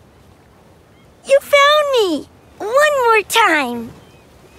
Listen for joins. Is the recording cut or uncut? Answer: cut